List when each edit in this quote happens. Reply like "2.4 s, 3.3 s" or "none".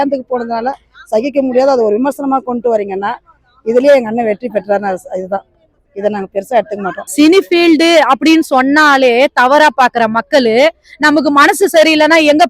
5.7 s, 7.0 s